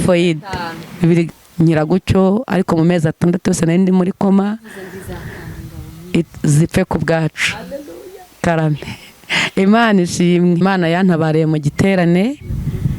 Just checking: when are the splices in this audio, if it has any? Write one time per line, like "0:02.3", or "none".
0:01.3
0:10.6

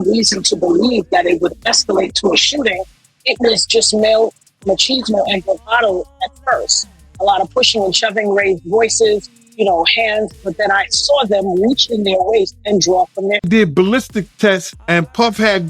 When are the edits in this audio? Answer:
0:13.5
0:14.7

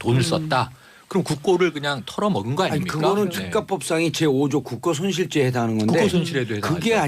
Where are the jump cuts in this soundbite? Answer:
0:02.8

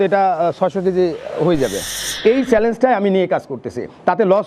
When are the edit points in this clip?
0:01.9

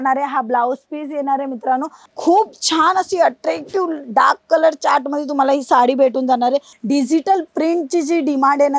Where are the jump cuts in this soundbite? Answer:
0:02.0
0:06.7

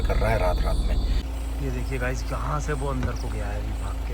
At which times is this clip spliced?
0:01.2

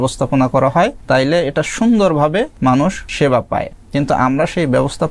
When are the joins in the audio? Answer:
0:01.0
0:02.9
0:03.8

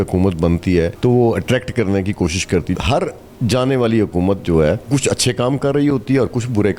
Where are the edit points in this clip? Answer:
0:00.9
0:02.7
0:04.9

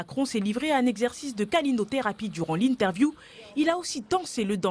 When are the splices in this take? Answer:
0:01.5

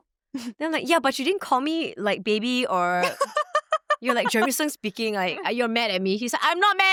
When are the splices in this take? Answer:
none

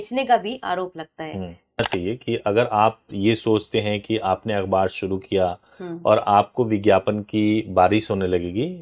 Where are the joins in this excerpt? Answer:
0:01.8

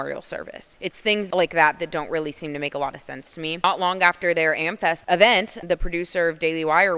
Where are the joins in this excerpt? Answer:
0:01.3
0:03.5
0:05.0
0:05.5

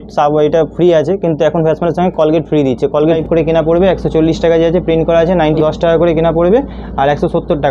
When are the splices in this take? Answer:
0:03.2
0:05.6

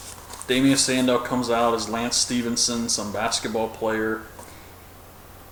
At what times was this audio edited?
none

